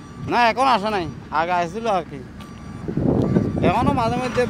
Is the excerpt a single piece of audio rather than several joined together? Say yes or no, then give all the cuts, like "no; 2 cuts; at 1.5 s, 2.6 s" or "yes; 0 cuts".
yes; 0 cuts